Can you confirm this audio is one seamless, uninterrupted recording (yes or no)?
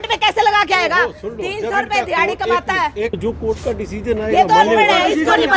no